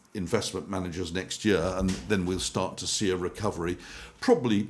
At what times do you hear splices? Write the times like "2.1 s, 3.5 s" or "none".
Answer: none

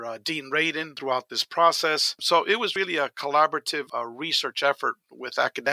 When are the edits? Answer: 1.0 s, 2.2 s, 3.8 s

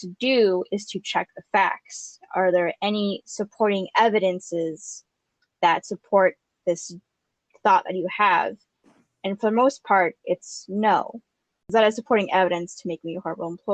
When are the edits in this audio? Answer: 11.5 s

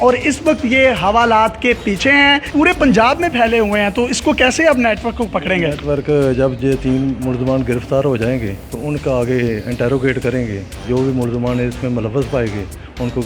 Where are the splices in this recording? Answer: 2.5 s

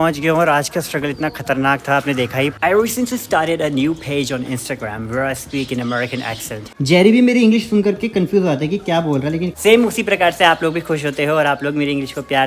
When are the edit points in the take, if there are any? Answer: 2.5 s, 6.6 s, 9.5 s

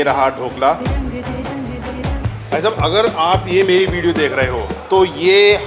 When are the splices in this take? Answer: 2.2 s

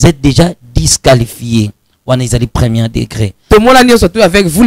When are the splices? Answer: 3.3 s

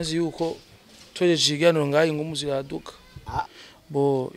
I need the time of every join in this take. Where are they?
3.4 s

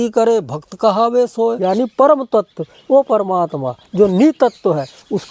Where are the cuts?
1.6 s

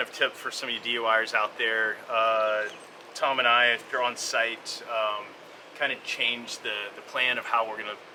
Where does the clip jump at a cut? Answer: none

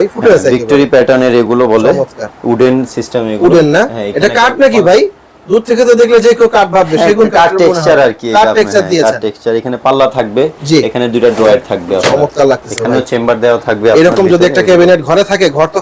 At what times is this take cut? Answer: none

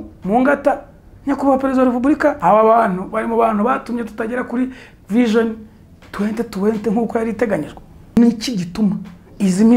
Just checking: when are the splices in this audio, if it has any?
2.4 s, 8.2 s

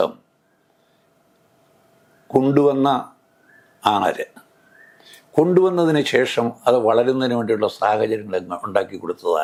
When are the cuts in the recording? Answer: none

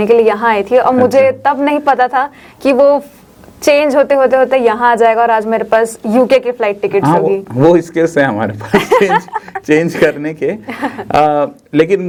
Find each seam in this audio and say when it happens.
none

